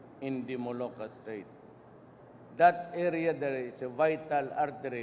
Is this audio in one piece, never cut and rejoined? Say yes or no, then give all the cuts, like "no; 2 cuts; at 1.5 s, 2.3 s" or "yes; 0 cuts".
no; 1 cut; at 3.7 s